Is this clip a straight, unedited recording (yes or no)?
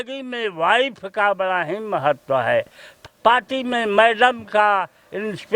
no